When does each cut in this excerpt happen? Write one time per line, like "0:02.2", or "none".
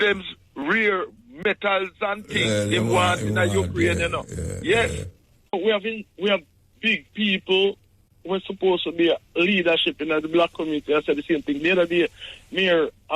0:05.5